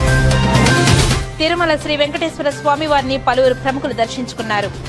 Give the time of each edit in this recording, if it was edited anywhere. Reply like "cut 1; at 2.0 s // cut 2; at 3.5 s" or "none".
cut 1; at 1.2 s